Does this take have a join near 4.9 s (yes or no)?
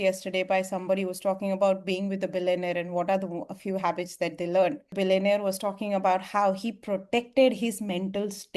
yes